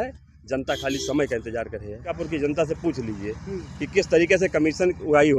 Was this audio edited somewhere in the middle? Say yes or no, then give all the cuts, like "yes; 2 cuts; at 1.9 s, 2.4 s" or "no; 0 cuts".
yes; 1 cut; at 2.2 s